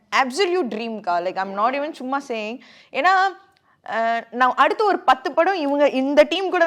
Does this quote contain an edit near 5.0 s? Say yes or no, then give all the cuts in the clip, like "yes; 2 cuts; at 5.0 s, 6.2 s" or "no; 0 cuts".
no; 0 cuts